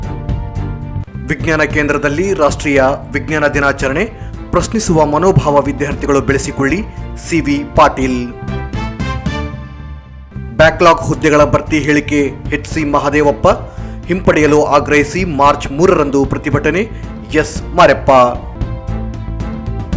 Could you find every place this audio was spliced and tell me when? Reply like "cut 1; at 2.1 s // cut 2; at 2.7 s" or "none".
none